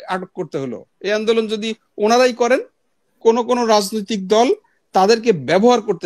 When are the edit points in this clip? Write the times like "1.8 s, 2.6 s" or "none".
3.2 s